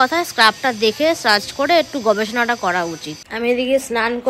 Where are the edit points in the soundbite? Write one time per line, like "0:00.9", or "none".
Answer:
0:03.1